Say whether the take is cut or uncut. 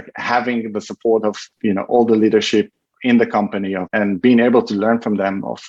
cut